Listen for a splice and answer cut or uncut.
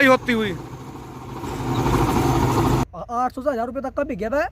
cut